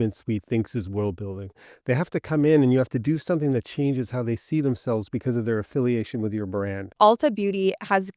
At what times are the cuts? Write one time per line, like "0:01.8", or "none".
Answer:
0:06.9